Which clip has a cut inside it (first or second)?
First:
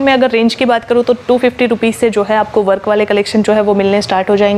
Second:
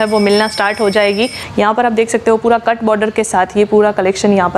second